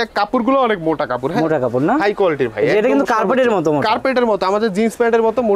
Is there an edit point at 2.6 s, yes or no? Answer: no